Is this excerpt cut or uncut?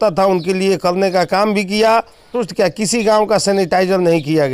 cut